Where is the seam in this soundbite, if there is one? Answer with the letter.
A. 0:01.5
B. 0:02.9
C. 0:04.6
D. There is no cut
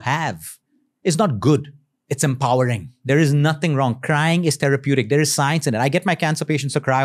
B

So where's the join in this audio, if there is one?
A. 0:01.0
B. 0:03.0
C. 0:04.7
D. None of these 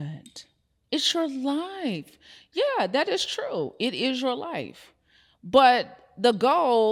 D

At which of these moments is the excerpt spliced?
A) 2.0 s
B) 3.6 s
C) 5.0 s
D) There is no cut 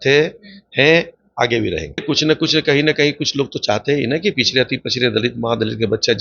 A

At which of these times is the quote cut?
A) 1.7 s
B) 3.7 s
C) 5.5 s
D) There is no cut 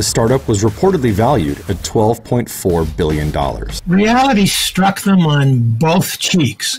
B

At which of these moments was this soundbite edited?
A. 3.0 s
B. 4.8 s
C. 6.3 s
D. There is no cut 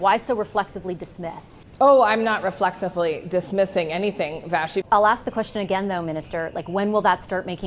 B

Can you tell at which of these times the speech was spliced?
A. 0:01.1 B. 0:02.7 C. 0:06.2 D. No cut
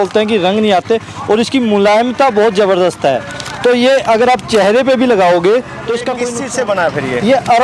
C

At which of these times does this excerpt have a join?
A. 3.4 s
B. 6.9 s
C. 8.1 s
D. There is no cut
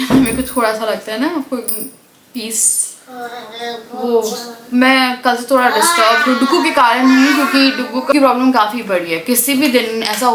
C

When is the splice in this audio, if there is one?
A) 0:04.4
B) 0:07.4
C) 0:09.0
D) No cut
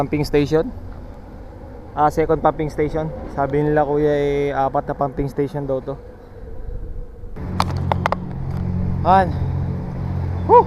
B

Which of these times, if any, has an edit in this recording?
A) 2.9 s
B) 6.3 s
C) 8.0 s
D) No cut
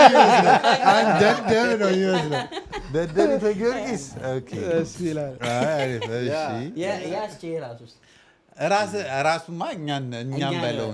D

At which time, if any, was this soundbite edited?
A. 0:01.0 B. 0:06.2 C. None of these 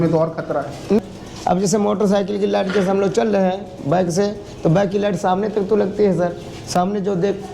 A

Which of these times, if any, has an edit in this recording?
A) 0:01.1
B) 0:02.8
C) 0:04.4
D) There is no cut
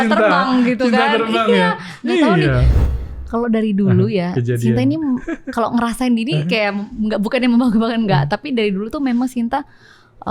B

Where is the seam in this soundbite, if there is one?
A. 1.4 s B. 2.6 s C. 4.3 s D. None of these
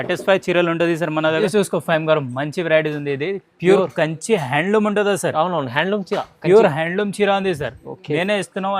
A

